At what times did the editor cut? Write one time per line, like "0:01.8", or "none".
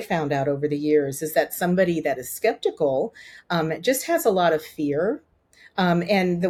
none